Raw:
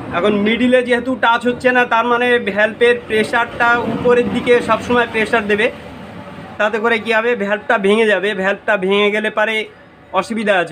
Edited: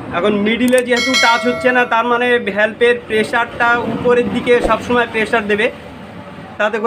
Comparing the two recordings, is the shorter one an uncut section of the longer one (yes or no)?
yes